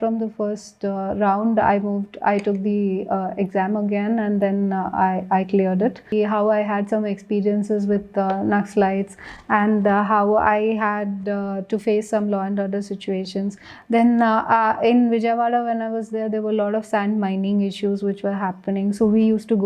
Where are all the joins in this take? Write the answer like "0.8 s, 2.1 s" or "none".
6.1 s